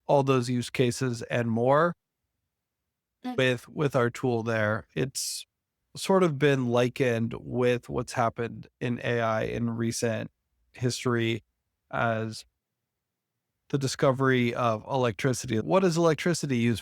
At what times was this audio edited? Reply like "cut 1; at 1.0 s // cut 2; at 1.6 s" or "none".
cut 1; at 3.4 s